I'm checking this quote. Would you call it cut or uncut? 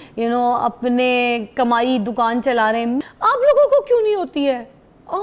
cut